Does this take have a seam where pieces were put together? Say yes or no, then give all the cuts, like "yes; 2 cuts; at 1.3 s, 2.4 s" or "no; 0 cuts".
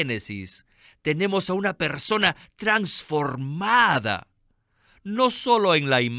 no; 0 cuts